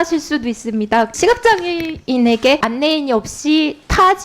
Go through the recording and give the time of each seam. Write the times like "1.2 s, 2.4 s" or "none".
1.1 s, 2.7 s